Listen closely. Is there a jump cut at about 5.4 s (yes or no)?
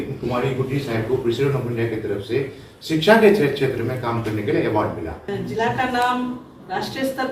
yes